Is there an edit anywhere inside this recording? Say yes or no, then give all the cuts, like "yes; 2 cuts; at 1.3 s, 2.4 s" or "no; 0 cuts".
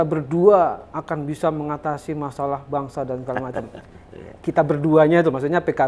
no; 0 cuts